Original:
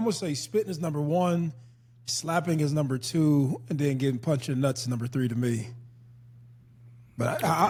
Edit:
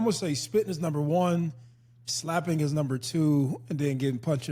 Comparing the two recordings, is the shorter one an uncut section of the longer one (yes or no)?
yes